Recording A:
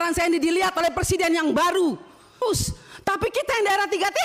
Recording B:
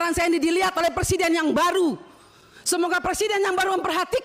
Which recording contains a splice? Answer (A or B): A